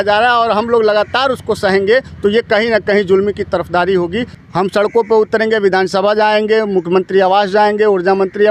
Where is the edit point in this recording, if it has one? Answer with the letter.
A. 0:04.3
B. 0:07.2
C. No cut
A